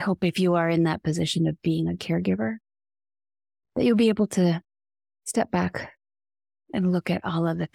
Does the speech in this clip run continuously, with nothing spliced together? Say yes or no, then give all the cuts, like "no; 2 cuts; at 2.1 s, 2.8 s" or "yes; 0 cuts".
yes; 0 cuts